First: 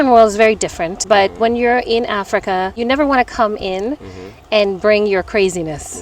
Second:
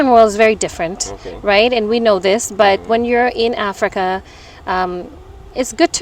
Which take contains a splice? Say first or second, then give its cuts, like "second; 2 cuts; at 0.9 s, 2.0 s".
first; 2 cuts; at 1.0 s, 2.7 s